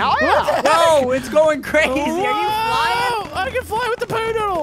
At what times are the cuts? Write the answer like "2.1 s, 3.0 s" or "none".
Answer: none